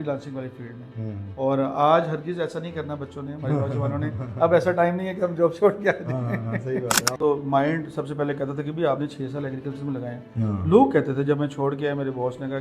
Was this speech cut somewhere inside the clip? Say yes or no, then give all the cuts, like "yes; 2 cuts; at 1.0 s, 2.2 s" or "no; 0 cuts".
yes; 1 cut; at 7.2 s